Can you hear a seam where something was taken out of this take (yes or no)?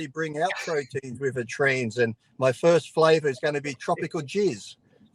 no